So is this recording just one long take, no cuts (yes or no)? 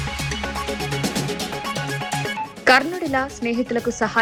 yes